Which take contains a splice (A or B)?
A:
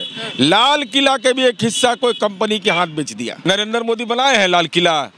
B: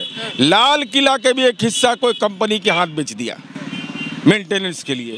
A